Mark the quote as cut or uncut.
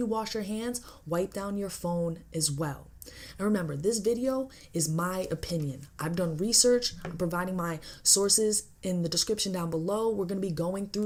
uncut